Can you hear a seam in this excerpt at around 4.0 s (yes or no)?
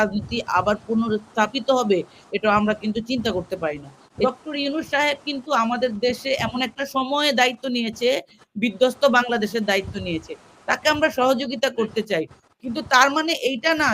yes